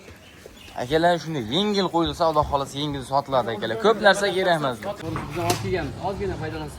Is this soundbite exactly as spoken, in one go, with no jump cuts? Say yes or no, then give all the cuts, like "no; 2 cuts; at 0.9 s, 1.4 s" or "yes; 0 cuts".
no; 1 cut; at 5.0 s